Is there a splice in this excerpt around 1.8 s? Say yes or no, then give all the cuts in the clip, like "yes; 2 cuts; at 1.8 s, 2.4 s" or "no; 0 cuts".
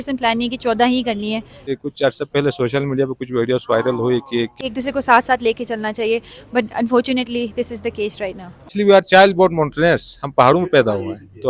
yes; 3 cuts; at 1.8 s, 4.6 s, 8.7 s